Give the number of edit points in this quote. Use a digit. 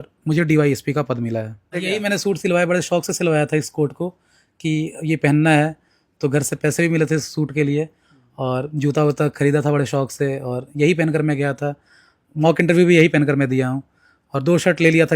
1